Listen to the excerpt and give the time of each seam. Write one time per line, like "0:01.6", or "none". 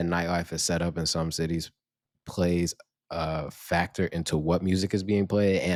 none